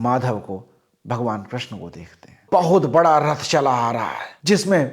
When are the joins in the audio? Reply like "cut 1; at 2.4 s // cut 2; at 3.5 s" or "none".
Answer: cut 1; at 2.3 s